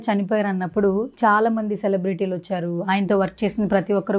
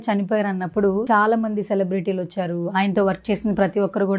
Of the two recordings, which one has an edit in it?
second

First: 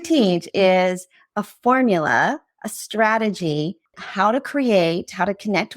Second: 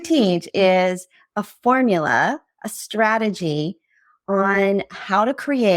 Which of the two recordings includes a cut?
first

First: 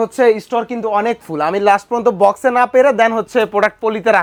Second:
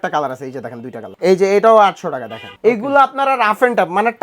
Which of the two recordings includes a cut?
second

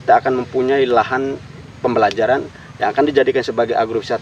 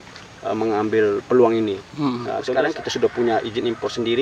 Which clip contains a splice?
second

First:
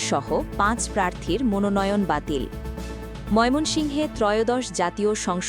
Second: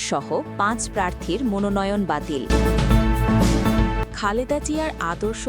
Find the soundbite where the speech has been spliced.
second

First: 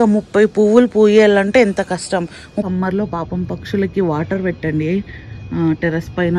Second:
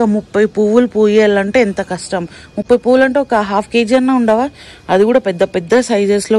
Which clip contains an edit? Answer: first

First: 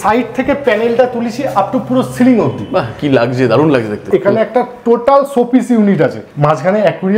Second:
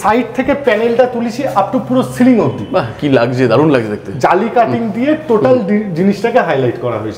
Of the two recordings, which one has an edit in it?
first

